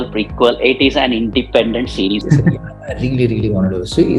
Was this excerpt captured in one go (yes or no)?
no